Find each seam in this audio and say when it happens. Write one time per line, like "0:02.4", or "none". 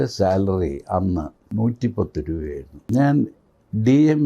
0:01.4
0:02.7